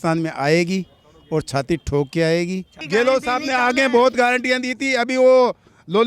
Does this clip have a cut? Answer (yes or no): yes